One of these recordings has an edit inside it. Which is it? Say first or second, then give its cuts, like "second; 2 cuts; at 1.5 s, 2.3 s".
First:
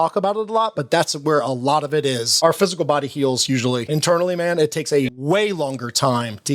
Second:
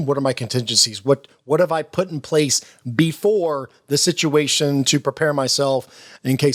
first; 3 cuts; at 2.3 s, 3.8 s, 5.2 s